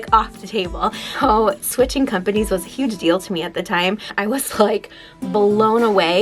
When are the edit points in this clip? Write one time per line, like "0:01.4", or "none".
0:01.1
0:04.1